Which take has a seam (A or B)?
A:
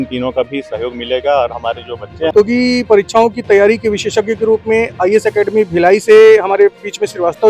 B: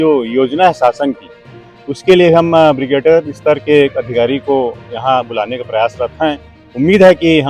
A